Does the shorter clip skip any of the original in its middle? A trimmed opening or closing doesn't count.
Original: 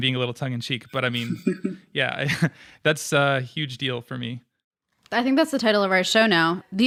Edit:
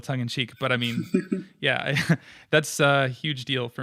no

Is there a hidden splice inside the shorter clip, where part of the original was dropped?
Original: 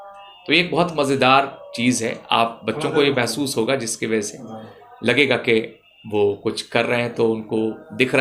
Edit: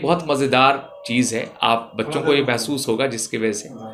no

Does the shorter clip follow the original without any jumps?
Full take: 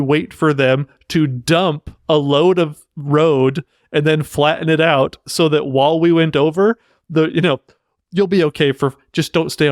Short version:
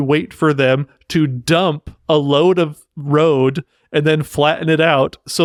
yes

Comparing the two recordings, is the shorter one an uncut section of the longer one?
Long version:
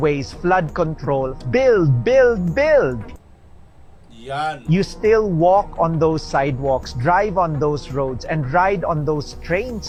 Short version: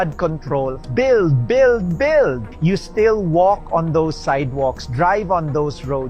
no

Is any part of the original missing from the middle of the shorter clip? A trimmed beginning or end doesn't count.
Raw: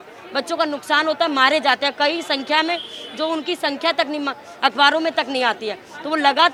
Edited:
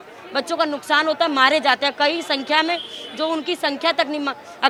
no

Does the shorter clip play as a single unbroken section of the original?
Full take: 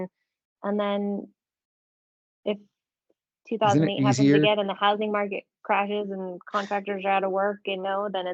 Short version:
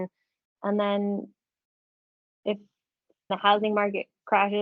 no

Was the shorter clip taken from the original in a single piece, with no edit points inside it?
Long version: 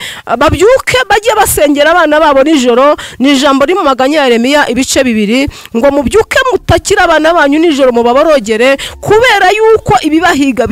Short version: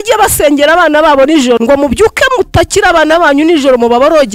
no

